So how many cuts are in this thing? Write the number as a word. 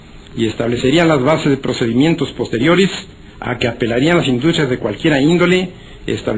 one